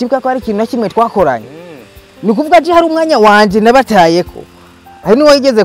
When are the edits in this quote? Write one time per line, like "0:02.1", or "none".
none